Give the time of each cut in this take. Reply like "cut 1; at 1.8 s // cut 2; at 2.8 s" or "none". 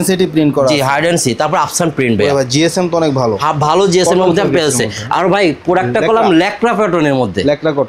none